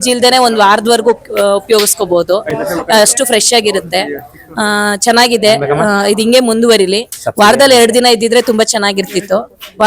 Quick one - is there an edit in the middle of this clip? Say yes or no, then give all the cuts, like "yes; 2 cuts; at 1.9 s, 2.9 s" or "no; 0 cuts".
no; 0 cuts